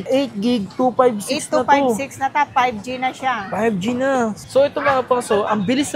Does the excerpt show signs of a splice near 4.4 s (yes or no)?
yes